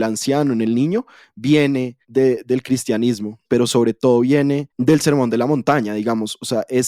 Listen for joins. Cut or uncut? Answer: cut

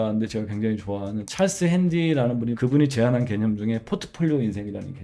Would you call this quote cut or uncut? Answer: uncut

